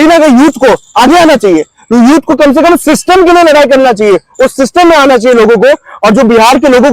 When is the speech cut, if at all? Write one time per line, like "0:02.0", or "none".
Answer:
none